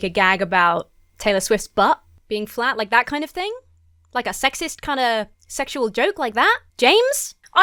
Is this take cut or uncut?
uncut